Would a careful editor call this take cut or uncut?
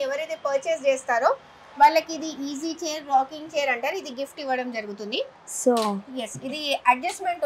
uncut